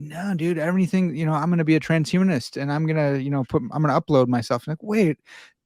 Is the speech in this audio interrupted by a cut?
no; 0 cuts

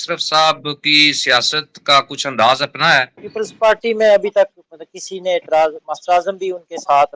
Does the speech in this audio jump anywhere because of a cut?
yes; 1 cut; at 3.2 s

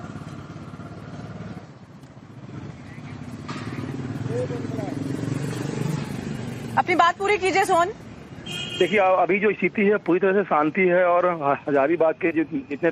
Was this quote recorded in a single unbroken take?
yes; 0 cuts

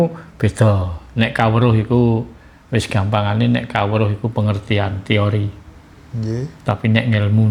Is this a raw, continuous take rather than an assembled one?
yes; 0 cuts

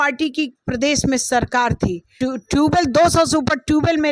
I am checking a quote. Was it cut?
yes; 1 cut; at 2.1 s

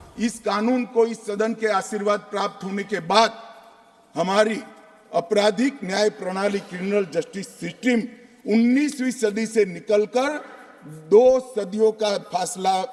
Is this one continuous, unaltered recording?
yes; 0 cuts

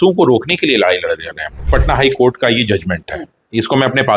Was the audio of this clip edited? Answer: yes; 1 cut; at 1.6 s

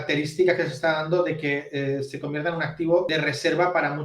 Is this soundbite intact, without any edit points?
no; 1 cut; at 3.1 s

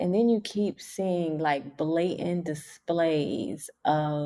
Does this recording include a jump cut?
no; 0 cuts

